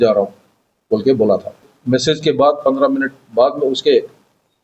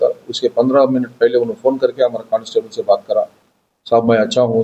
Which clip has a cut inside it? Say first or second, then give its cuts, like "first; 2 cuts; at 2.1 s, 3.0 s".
first; 1 cut; at 1.7 s